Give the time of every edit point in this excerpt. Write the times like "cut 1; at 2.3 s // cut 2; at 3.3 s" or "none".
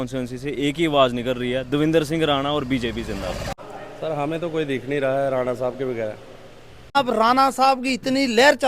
cut 1; at 3.5 s // cut 2; at 7.0 s